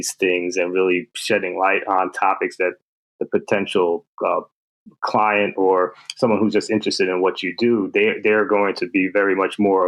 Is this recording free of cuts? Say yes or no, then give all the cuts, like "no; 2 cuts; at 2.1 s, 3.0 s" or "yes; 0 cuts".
yes; 0 cuts